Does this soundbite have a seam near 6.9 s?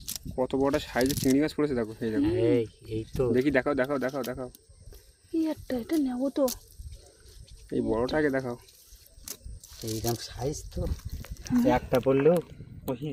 no; 0 cuts

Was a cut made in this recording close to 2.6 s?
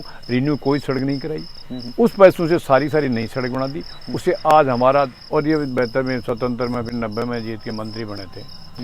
no; 1 cut; at 5.2 s

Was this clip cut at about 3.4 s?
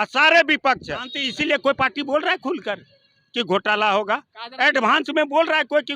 no; 1 cut; at 1.2 s

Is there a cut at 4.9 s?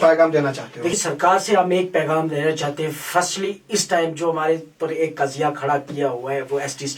no; 1 cut; at 1.0 s

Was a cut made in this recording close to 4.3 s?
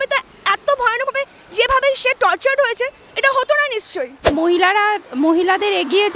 yes; 1 cut; at 4.3 s

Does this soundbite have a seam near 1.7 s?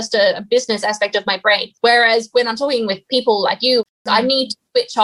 yes; 2 cuts; at 1.7 s, 3.8 s

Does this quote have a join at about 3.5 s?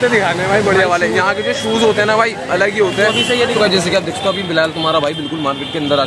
yes; 1 cut; at 3.5 s

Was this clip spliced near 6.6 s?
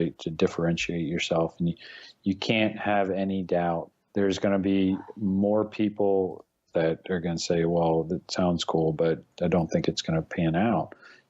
yes; 3 cuts; at 3.9 s, 6.6 s, 9.3 s

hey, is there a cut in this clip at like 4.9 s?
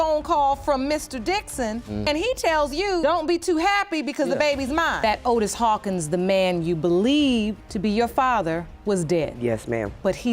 yes; 1 cut; at 4.9 s

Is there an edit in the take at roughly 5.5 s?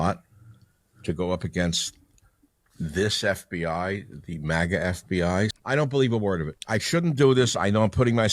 yes; 2 cuts; at 5.5 s, 6.5 s

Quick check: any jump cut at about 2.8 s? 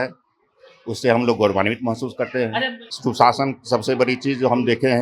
yes; 1 cut; at 2.8 s

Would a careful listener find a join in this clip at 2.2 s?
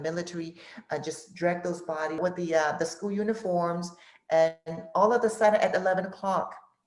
yes; 1 cut; at 2.2 s

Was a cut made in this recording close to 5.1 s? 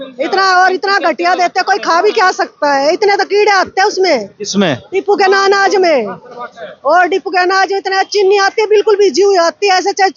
no; 0 cuts

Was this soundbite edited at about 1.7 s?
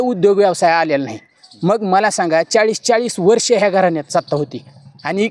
no; 0 cuts

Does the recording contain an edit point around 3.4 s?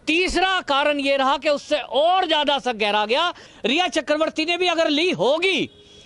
yes; 1 cut; at 3.4 s

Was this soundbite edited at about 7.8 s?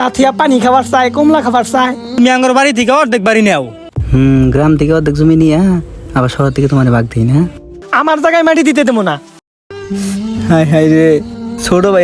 yes; 2 cuts; at 2.2 s, 7.8 s

